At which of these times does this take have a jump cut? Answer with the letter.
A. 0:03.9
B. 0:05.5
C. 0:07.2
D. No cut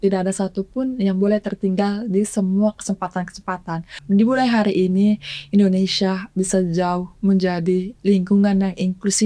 A